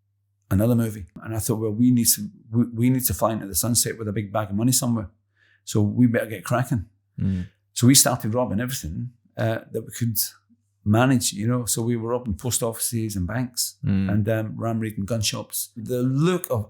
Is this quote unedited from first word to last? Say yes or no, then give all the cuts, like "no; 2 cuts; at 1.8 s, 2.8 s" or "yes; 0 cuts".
no; 2 cuts; at 1.2 s, 15.9 s